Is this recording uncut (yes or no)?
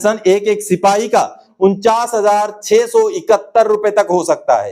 no